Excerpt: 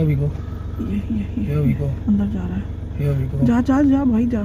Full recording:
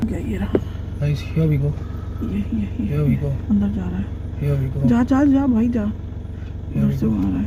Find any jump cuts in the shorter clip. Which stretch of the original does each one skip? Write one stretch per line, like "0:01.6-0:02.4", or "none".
none